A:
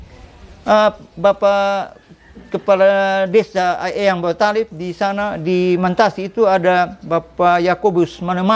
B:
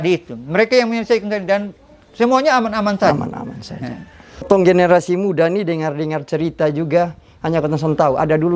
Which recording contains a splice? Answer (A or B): B